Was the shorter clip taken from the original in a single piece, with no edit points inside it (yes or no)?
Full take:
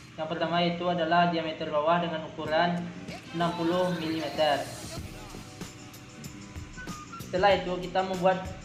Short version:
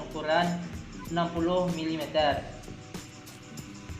no